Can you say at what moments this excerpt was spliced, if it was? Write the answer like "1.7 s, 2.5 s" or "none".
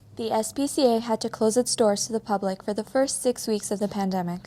none